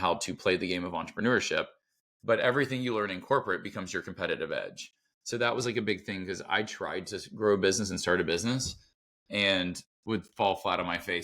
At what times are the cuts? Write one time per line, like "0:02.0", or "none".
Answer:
none

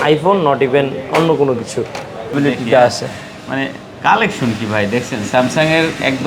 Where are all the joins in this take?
0:02.3

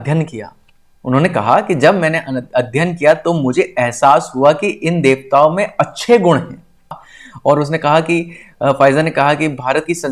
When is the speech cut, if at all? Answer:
0:07.0

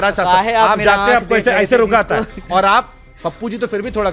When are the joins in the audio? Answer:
none

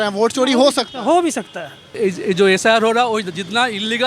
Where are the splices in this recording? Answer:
0:01.9

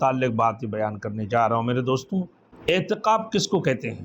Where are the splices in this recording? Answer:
0:02.4

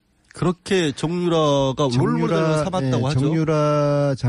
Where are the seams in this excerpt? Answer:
none

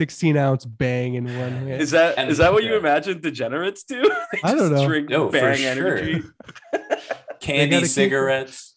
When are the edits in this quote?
none

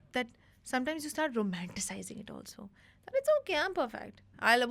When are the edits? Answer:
none

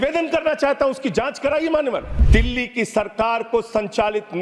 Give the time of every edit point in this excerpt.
0:02.1

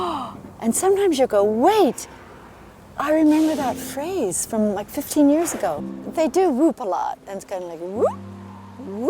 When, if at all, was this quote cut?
0:05.9

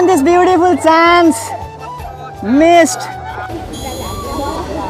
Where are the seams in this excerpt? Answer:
0:03.5

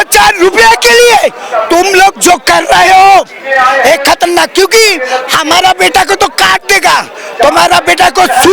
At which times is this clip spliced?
none

